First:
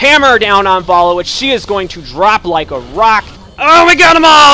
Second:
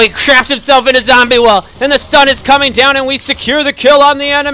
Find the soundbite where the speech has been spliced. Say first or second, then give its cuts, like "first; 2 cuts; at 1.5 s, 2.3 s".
first; 1 cut; at 3.4 s